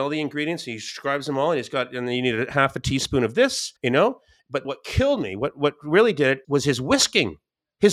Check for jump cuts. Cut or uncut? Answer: uncut